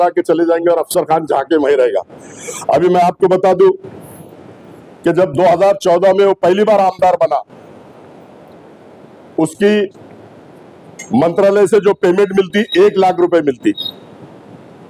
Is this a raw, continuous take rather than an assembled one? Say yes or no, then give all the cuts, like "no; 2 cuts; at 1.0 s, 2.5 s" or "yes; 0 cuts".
yes; 0 cuts